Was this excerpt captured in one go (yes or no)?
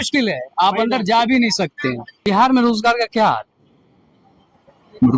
no